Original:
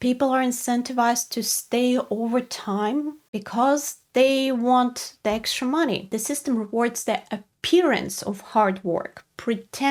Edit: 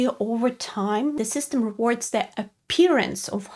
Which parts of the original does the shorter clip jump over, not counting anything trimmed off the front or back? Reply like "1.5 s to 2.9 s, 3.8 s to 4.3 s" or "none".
3.1 s to 6.1 s